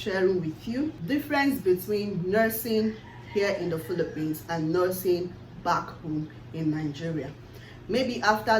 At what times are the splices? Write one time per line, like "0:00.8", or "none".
0:01.0

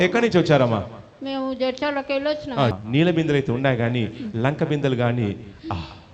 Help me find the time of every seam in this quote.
0:02.7

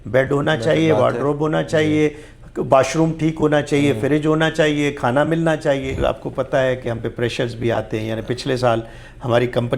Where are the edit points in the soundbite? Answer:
0:06.0

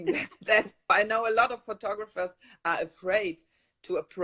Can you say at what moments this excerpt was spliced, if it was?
0:00.9

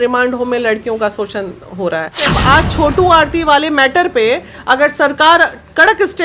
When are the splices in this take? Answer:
0:02.3

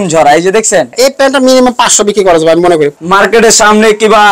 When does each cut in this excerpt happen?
0:00.9
0:02.9

